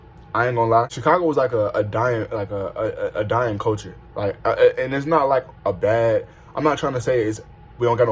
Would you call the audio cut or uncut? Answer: cut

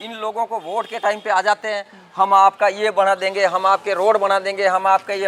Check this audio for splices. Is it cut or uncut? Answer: uncut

